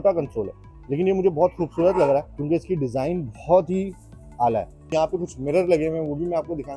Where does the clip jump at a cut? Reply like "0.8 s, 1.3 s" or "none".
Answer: 2.3 s, 4.9 s

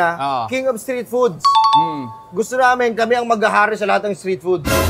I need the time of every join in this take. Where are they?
none

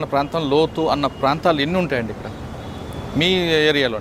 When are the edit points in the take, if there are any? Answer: none

